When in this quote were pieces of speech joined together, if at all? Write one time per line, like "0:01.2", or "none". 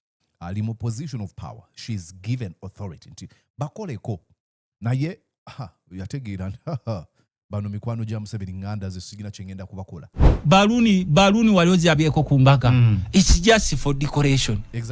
0:10.2